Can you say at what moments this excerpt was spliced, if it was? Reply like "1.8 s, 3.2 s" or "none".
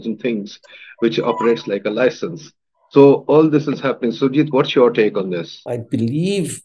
5.6 s